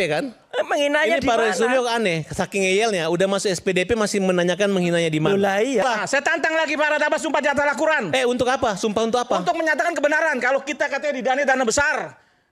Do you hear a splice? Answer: yes; 1 cut; at 5.8 s

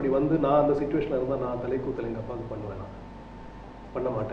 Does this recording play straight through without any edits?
yes; 0 cuts

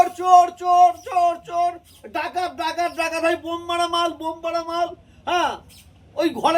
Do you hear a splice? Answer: no; 0 cuts

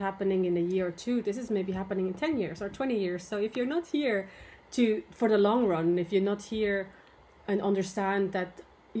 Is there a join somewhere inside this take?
no; 0 cuts

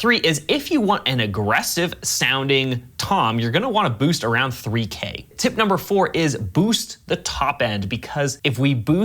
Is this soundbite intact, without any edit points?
no; 1 cut; at 5.3 s

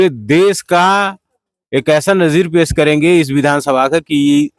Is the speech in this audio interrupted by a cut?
no; 0 cuts

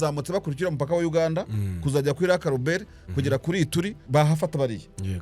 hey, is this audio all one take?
no; 1 cut; at 4.0 s

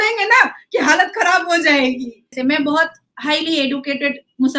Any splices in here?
yes; 1 cut; at 2.3 s

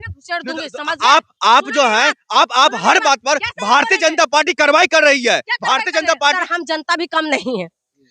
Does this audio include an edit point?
yes; 1 cut; at 6.4 s

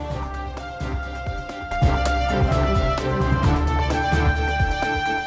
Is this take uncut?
no; 1 cut; at 1.7 s

